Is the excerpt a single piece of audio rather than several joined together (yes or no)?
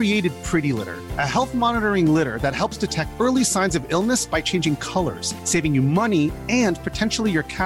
yes